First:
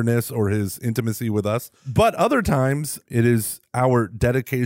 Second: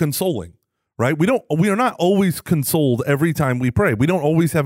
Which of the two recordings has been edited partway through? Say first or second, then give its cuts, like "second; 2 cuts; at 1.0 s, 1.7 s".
first; 2 cuts; at 1.8 s, 3.0 s